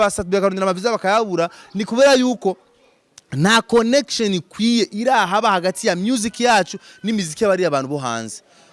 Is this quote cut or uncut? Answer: uncut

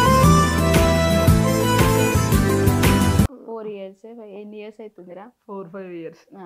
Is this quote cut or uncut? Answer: cut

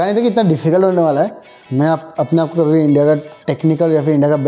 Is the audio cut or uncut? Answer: cut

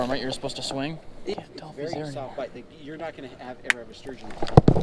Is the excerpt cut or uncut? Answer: cut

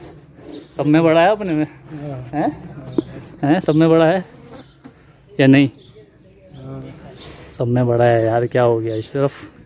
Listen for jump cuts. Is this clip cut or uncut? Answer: uncut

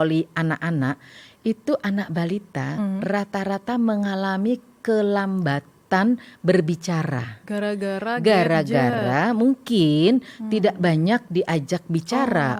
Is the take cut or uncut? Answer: uncut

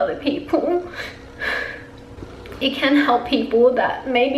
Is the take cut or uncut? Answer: cut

